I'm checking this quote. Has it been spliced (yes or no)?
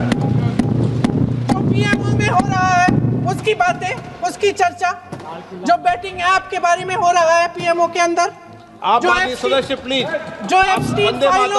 no